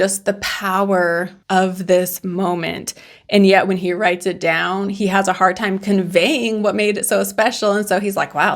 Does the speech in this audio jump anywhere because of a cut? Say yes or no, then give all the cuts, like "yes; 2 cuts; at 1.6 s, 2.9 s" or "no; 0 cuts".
yes; 1 cut; at 1.4 s